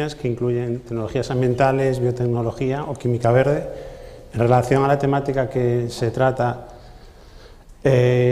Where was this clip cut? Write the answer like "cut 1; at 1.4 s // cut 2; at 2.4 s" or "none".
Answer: none